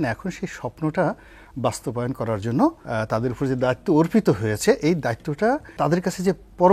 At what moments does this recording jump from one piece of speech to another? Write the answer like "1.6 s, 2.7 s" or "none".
2.8 s, 5.8 s